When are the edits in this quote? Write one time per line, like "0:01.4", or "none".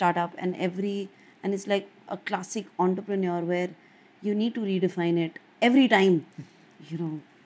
none